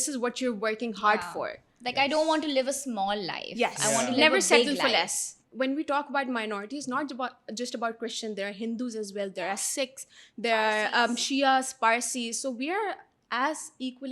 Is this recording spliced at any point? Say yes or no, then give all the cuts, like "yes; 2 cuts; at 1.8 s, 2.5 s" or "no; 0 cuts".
yes; 1 cut; at 5.4 s